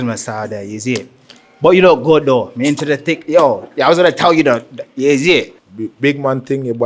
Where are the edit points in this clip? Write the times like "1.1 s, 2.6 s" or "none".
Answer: 5.6 s